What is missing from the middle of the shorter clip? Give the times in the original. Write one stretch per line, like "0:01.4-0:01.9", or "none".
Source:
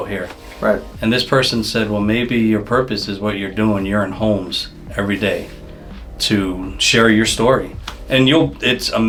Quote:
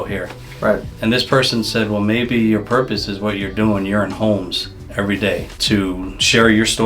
0:05.5-0:06.1